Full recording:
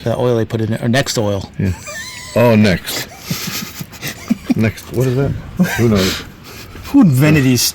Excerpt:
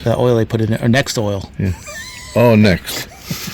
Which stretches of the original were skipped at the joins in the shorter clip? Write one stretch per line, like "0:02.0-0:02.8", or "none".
none